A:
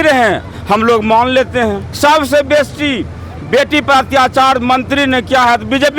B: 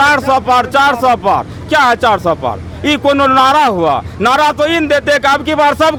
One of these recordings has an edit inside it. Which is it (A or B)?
A